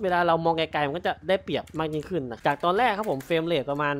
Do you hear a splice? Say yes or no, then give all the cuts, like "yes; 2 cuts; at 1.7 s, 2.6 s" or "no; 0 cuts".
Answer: yes; 1 cut; at 2.3 s